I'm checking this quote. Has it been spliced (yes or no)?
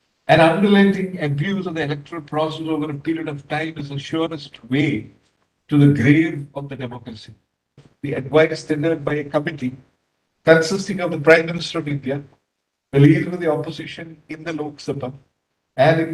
yes